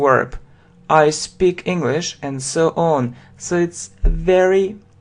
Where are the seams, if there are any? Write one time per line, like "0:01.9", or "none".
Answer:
0:03.8